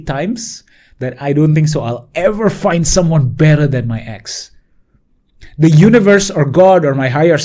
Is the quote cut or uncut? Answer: uncut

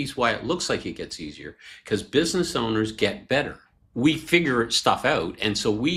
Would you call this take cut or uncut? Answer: uncut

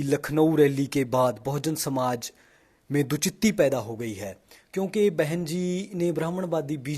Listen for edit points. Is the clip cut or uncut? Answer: uncut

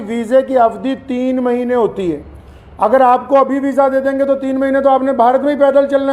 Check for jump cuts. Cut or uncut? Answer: uncut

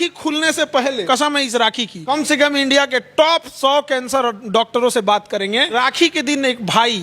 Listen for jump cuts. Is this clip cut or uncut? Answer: cut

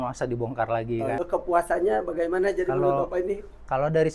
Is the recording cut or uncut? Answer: cut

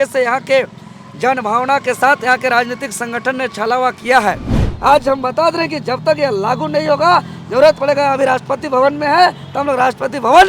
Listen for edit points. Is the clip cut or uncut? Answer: cut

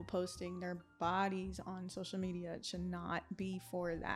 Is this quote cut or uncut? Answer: uncut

